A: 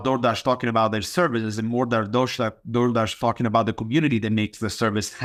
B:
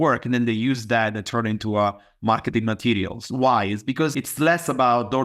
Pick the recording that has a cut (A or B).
B